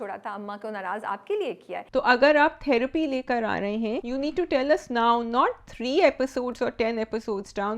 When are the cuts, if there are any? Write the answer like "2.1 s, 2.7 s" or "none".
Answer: 1.8 s, 4.0 s